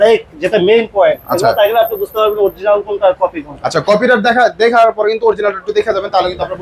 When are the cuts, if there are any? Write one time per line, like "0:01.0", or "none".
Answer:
none